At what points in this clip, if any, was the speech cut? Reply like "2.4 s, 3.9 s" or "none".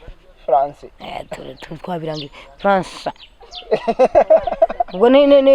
none